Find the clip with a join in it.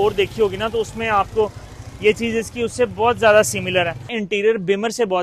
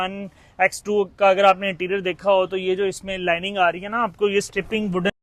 first; 1 cut; at 4.1 s

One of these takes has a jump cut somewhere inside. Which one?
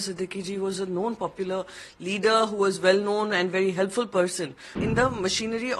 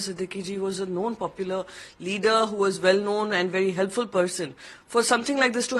first; 1 cut; at 4.8 s

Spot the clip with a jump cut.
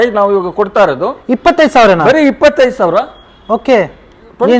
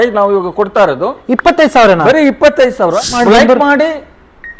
second; 1 cut; at 3.1 s

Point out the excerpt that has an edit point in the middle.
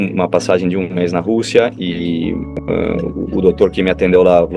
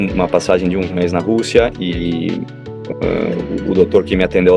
first; 1 cut; at 2.5 s

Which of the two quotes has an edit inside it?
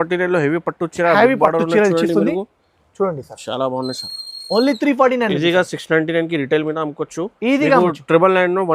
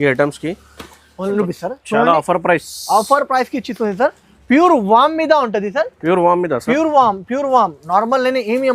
second; 1 cut; at 1.4 s

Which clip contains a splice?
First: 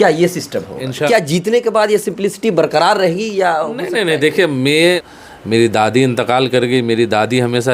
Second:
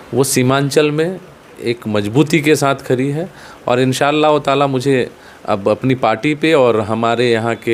first; 2 cuts; at 1.1 s, 5.0 s

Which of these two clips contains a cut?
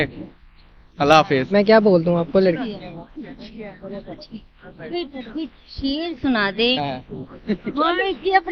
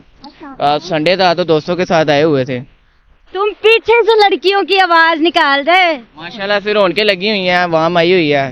first; 2 cuts; at 1.5 s, 6.8 s

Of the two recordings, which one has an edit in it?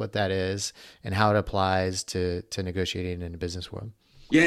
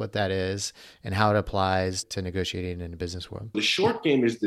second; 2 cuts; at 2.0 s, 3.5 s

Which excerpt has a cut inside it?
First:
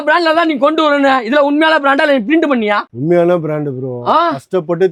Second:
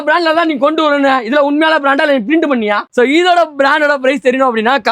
second; 1 cut; at 2.9 s

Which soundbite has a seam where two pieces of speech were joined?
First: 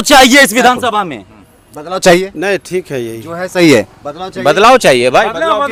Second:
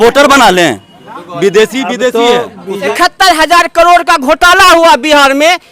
second; 1 cut; at 2.9 s

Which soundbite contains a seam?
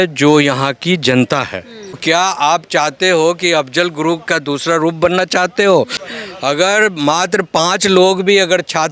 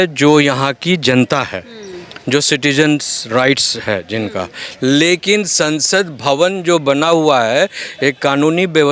first; 2 cuts; at 2.0 s, 6.0 s

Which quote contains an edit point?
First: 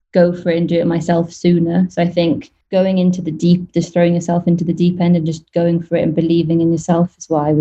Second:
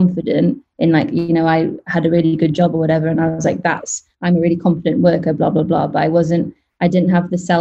first; 1 cut; at 2.5 s

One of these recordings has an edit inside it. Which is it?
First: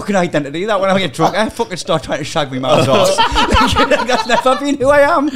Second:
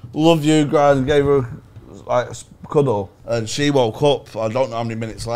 second; 1 cut; at 3.2 s

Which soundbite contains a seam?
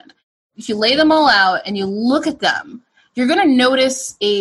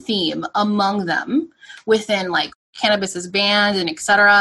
second; 1 cut; at 2.6 s

